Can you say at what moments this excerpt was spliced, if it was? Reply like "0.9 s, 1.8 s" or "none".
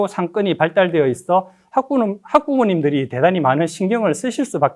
none